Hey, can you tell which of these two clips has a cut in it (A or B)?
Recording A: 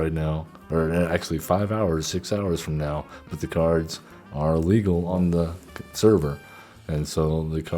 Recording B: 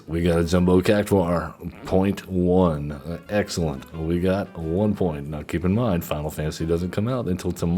A